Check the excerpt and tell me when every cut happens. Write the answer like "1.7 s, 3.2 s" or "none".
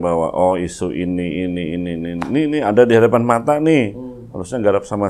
none

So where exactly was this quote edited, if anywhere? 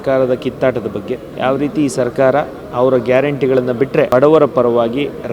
1.3 s, 4.1 s

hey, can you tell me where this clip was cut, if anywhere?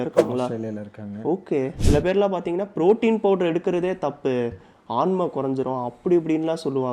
1.8 s

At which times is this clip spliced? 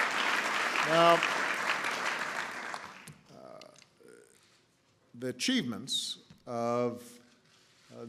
none

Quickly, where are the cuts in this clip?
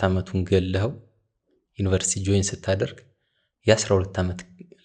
none

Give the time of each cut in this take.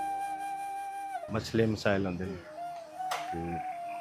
none

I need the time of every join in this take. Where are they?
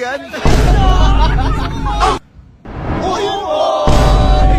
2.2 s

